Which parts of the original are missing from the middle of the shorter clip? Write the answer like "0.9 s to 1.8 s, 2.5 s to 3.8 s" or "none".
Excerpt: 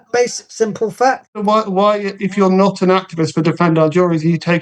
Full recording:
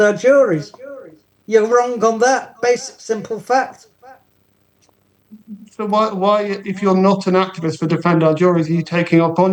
3.8 s to 5.7 s